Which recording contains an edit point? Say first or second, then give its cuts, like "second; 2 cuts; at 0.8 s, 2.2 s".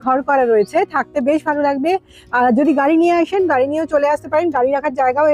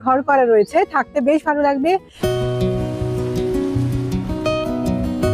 second; 1 cut; at 2.1 s